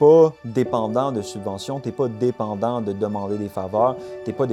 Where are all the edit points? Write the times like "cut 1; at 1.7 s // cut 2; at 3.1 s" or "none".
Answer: none